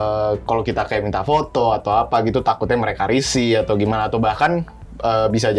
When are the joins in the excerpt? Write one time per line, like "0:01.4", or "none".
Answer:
none